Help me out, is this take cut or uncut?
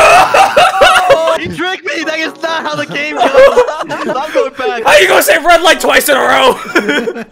cut